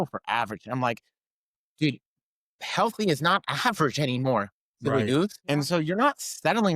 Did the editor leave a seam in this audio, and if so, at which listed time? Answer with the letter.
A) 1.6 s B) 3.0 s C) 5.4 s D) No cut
C